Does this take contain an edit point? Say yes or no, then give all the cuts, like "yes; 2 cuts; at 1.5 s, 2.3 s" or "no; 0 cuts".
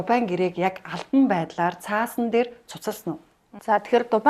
no; 0 cuts